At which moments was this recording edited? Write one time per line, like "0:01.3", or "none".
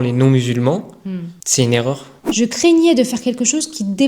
0:02.2